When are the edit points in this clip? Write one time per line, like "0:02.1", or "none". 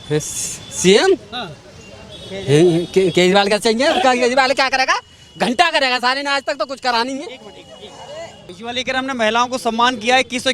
0:08.5